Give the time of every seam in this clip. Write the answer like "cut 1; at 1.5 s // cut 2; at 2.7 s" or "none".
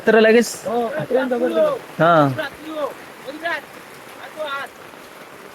none